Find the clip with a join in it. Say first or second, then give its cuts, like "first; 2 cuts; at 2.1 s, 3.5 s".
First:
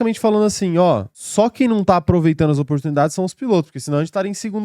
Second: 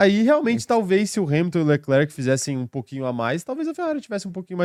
first; 1 cut; at 1.2 s